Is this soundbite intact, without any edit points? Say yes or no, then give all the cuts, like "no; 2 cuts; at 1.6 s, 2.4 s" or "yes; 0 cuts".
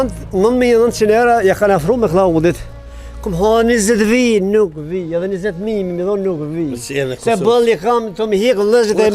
yes; 0 cuts